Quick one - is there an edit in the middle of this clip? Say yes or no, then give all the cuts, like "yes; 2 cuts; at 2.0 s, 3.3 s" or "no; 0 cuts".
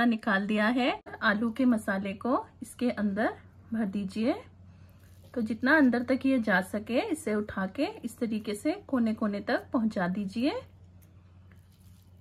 yes; 1 cut; at 1.2 s